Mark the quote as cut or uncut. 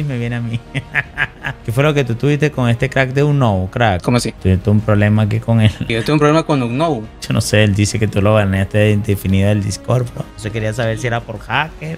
cut